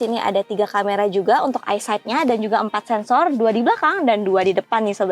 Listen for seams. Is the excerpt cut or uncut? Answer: uncut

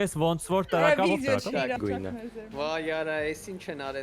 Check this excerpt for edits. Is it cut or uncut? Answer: cut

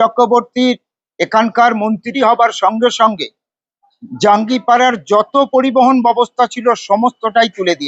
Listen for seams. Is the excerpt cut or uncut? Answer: uncut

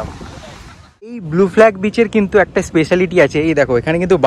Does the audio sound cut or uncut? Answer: cut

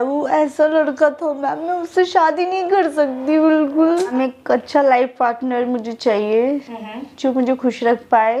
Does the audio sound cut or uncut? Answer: cut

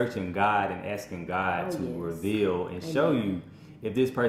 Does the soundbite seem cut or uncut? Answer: uncut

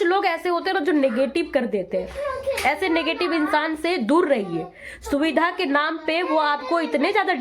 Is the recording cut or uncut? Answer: uncut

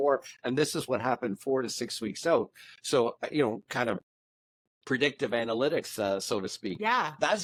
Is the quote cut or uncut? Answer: uncut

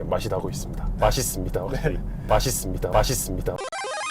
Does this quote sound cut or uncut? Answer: uncut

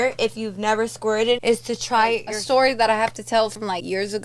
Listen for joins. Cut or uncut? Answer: cut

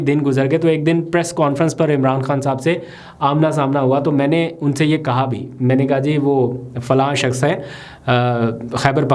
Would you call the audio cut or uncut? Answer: uncut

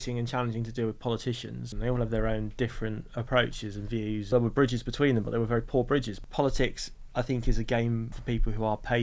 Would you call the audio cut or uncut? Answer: cut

